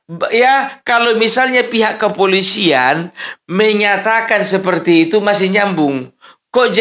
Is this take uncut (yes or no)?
yes